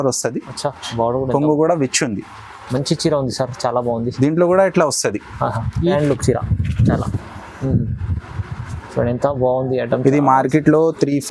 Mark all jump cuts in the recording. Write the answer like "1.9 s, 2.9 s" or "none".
5.9 s